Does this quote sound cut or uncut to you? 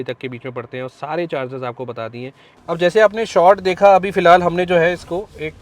cut